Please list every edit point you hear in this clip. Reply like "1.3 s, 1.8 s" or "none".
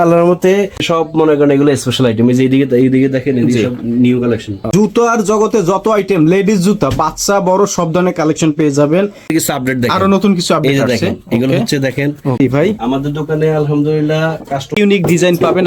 0.8 s, 4.7 s, 9.3 s, 12.4 s, 14.7 s

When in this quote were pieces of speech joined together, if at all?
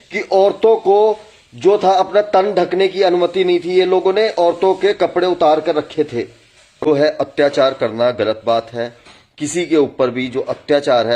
6.9 s

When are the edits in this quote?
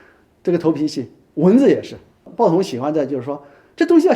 2.2 s

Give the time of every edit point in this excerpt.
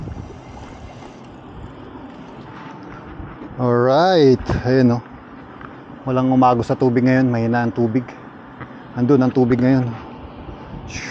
2.4 s

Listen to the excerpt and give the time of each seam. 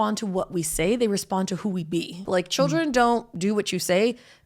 2.2 s

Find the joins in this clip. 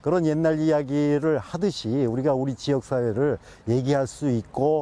none

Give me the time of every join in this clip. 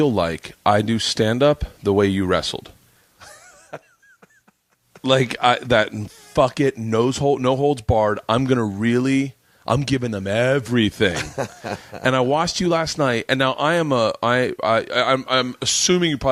none

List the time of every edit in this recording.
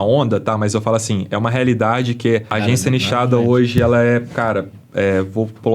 2.5 s

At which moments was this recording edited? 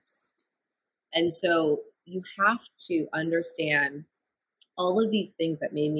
none

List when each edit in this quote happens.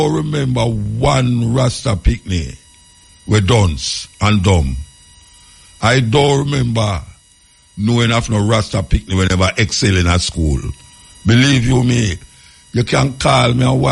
none

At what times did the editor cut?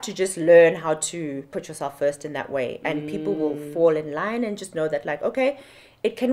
1.5 s

